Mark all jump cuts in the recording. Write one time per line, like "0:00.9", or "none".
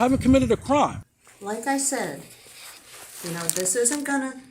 0:01.0